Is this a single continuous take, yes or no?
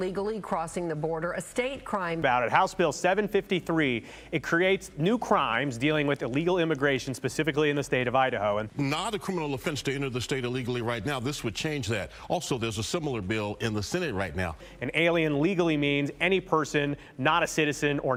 yes